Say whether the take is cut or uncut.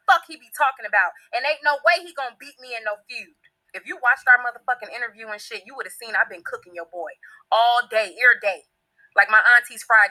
uncut